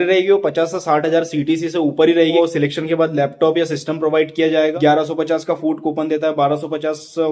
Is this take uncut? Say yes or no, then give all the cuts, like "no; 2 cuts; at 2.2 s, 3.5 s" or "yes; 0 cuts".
no; 2 cuts; at 2.3 s, 4.7 s